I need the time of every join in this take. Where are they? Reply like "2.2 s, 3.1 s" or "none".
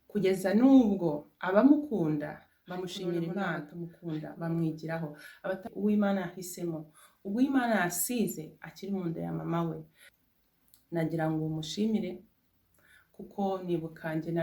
3.7 s